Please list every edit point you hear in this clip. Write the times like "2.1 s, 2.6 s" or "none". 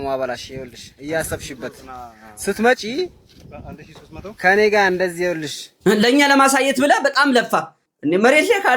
5.7 s, 7.8 s